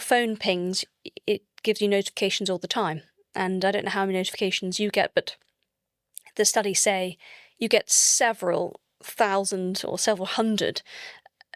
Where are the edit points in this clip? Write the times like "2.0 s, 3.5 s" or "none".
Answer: none